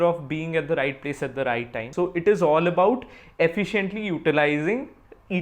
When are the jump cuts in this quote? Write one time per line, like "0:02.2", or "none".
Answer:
0:01.9